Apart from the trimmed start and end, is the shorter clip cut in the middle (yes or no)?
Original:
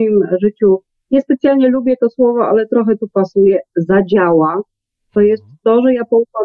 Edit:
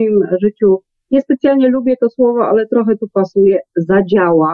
no